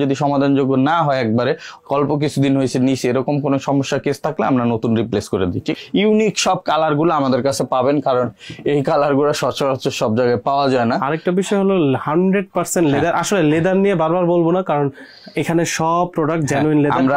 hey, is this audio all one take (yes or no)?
no